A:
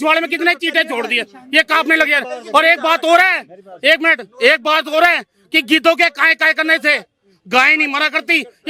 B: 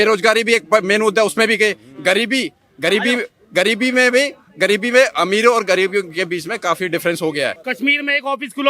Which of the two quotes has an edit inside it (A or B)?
B